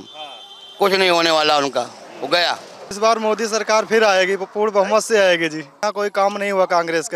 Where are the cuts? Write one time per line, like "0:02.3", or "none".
0:02.9
0:05.8